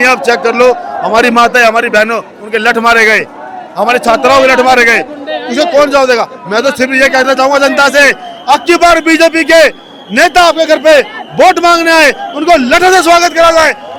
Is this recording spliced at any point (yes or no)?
no